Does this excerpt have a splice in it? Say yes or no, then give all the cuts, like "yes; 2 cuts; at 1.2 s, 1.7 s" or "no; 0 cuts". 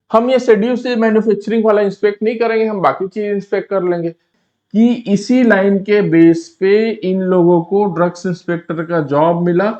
yes; 1 cut; at 4.3 s